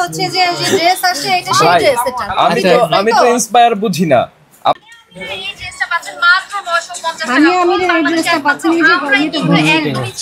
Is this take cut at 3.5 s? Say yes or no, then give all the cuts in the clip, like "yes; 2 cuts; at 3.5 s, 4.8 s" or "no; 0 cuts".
no; 1 cut; at 4.8 s